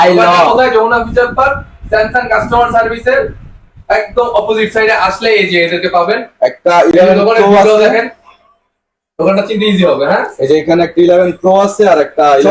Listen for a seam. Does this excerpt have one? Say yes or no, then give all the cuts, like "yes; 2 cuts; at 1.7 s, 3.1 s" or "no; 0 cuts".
no; 0 cuts